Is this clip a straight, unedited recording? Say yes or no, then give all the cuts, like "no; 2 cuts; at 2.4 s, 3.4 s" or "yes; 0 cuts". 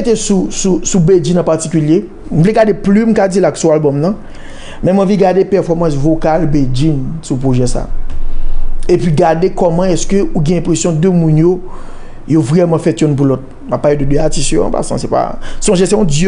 yes; 0 cuts